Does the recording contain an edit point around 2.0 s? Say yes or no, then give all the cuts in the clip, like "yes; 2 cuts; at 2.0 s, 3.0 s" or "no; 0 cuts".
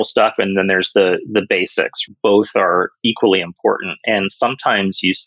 yes; 1 cut; at 2.0 s